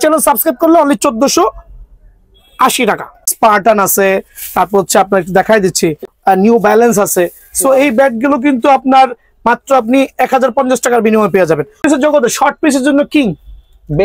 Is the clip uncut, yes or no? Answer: no